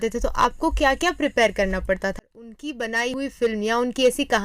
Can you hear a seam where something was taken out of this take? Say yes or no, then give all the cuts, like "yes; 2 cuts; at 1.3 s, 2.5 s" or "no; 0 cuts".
yes; 1 cut; at 2.3 s